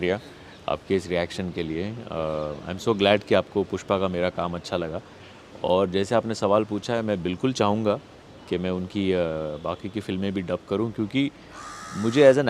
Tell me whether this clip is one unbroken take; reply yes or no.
yes